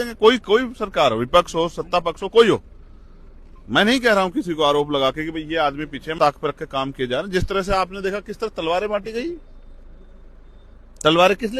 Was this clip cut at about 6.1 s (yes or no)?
yes